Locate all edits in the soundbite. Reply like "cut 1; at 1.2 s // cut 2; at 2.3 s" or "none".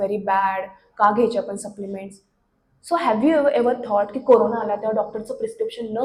none